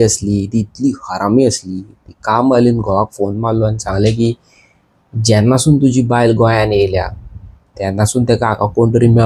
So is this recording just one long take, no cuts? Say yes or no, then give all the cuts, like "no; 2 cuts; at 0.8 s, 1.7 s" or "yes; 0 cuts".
yes; 0 cuts